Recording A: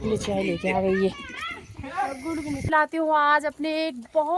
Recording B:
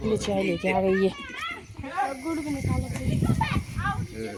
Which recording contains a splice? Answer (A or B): A